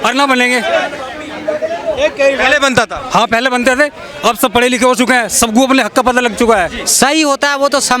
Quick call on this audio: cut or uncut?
cut